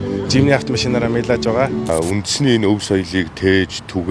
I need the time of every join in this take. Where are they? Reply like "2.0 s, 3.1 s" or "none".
1.9 s